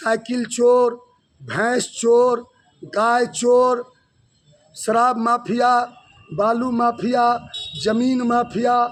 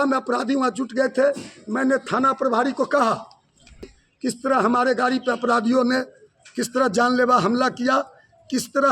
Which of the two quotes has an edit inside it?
second; 1 cut; at 3.9 s

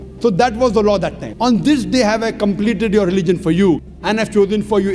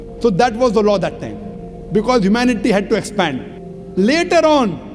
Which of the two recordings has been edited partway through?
first; 1 cut; at 1.3 s

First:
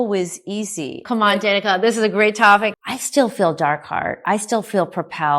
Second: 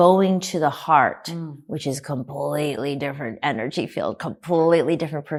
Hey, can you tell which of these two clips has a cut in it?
first; 1 cut; at 2.8 s

